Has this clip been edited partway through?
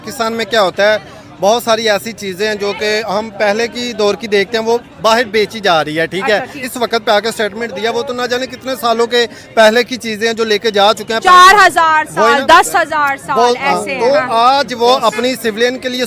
yes; 1 cut; at 6.6 s

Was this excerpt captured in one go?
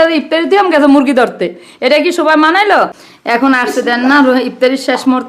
no; 1 cut; at 3.0 s

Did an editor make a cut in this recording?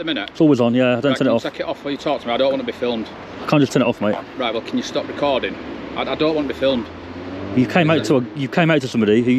no; 0 cuts

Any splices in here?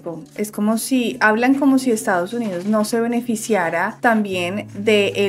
no; 0 cuts

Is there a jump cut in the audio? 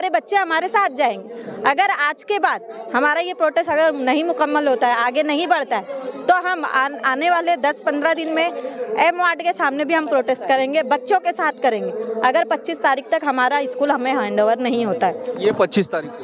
no; 0 cuts

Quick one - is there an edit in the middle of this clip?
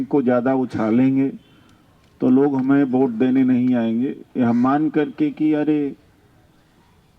no; 0 cuts

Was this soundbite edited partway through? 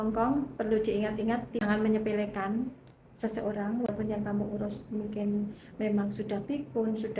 yes; 2 cuts; at 1.6 s, 3.9 s

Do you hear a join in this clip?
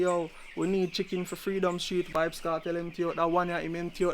yes; 1 cut; at 2.1 s

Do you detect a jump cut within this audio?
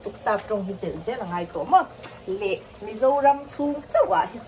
no; 0 cuts

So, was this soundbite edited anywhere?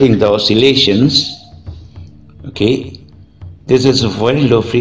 no; 0 cuts

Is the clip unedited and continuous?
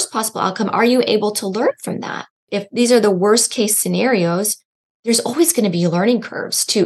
no; 1 cut; at 2.5 s

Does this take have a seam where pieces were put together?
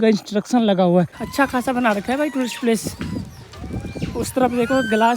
yes; 1 cut; at 1.1 s

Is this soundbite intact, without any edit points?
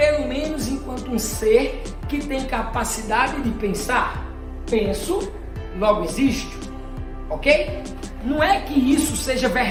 yes; 0 cuts

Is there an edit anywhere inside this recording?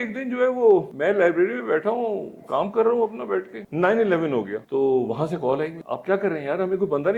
yes; 4 cuts; at 0.9 s, 3.6 s, 4.6 s, 5.9 s

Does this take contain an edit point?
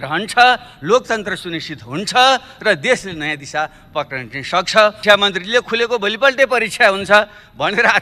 yes; 1 cut; at 5.0 s

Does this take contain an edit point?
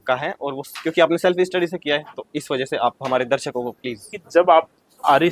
yes; 1 cut; at 4.2 s

